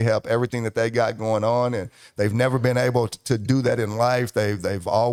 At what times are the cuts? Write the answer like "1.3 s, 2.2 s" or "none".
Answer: none